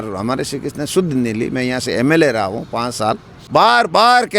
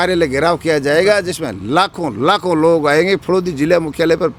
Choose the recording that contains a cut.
first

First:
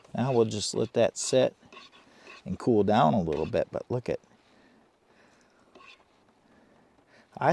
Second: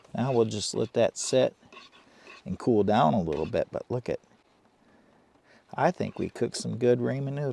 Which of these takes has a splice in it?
second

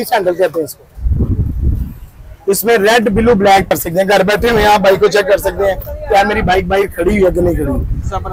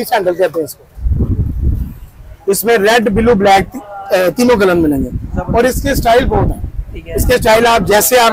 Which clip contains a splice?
first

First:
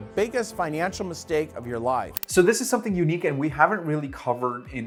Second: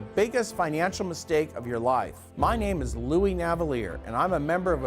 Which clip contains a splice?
second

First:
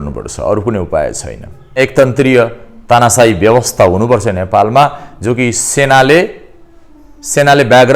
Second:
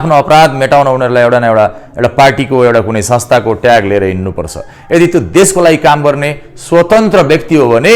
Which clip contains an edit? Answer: first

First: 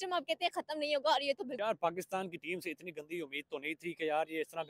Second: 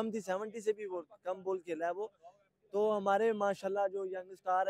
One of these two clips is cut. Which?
first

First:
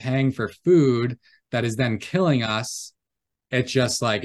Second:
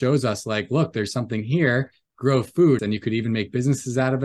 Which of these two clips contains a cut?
second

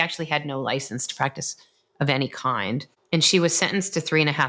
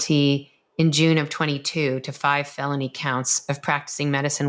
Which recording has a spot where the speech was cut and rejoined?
first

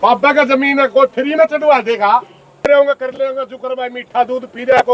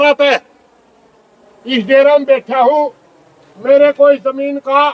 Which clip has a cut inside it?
first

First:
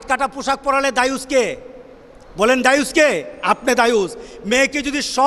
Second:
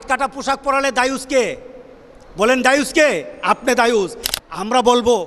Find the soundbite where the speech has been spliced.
second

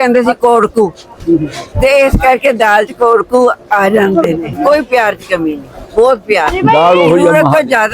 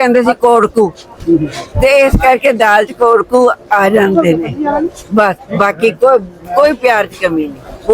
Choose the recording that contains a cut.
first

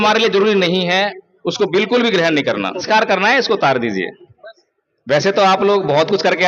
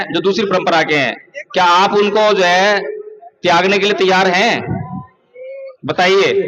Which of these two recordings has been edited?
first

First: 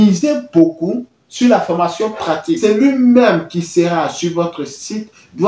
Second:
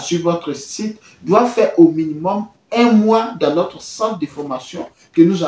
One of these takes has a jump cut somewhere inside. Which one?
first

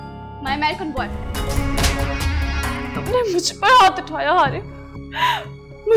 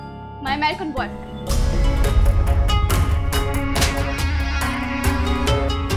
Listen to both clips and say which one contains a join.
first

